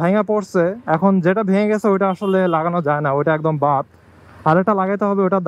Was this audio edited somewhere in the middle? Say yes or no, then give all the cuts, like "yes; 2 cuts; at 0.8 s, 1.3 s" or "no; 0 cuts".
no; 0 cuts